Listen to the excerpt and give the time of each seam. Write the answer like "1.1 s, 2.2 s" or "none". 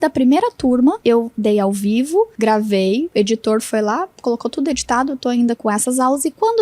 1.0 s, 2.3 s, 3.1 s, 4.1 s, 5.6 s